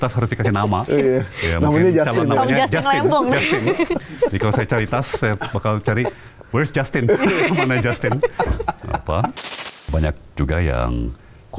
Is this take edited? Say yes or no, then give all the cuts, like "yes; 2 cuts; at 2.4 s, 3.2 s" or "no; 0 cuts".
yes; 1 cut; at 9.8 s